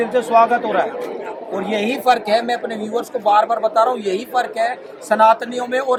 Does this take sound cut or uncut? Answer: uncut